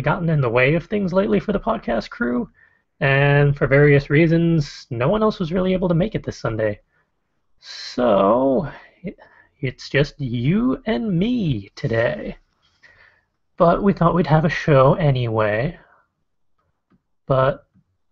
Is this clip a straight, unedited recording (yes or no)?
yes